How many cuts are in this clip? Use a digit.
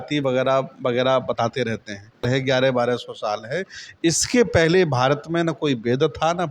1